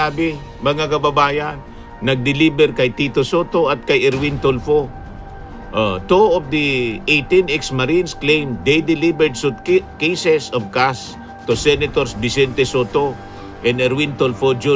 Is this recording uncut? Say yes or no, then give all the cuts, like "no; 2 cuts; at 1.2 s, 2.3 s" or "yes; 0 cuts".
yes; 0 cuts